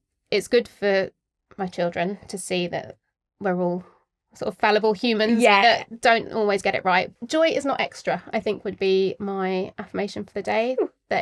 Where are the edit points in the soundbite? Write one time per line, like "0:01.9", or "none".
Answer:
0:07.1